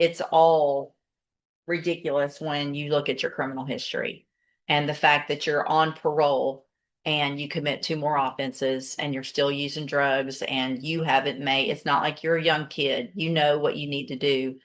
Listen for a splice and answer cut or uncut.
uncut